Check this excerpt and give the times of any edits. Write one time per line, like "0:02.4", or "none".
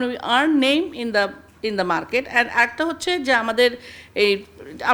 none